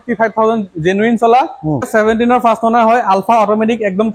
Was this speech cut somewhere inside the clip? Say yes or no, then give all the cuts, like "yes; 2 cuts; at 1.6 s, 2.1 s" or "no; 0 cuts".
yes; 1 cut; at 1.9 s